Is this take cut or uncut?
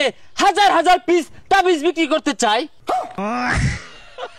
cut